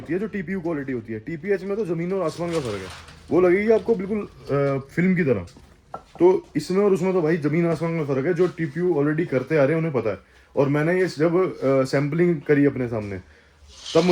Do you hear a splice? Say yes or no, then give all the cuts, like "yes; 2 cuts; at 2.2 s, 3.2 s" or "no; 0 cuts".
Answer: no; 0 cuts